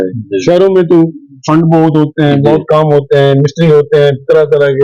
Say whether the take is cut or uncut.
uncut